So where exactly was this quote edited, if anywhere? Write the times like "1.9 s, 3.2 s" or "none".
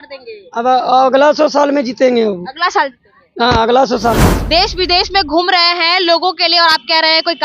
4.3 s